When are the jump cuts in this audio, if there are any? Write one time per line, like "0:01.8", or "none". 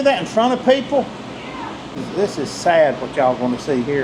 0:02.0